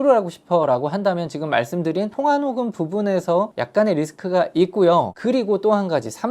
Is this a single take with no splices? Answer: no; 2 cuts; at 3.6 s, 5.1 s

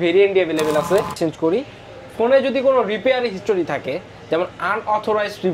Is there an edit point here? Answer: yes; 1 cut; at 1.1 s

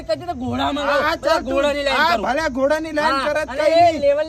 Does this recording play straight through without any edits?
yes; 0 cuts

